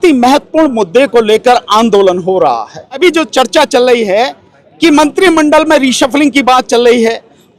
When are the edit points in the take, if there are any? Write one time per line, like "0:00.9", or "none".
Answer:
0:03.0